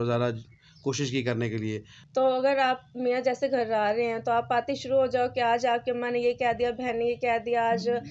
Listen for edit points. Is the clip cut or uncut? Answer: cut